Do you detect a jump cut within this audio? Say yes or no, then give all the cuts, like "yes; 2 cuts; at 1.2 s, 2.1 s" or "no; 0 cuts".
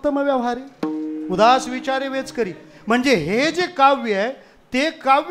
no; 0 cuts